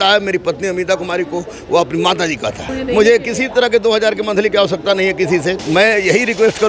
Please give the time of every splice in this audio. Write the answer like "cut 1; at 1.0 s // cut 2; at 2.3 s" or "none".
cut 1; at 2.7 s // cut 2; at 5.6 s

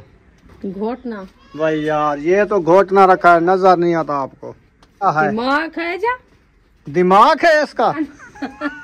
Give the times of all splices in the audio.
cut 1; at 1.4 s // cut 2; at 5.1 s // cut 3; at 8.0 s

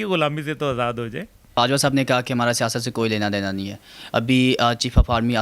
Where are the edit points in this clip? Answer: none

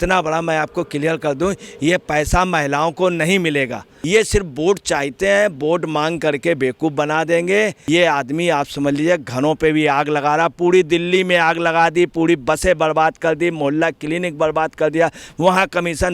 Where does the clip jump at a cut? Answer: cut 1; at 3.9 s // cut 2; at 7.8 s

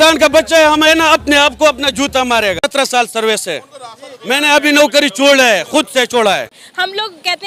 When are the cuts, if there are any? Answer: none

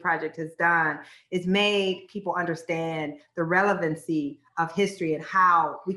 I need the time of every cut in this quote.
none

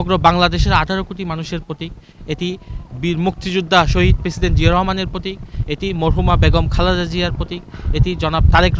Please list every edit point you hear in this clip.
none

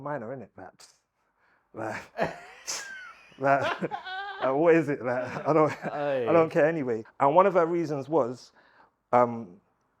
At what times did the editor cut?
cut 1; at 7.0 s

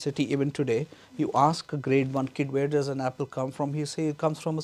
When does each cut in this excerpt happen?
none

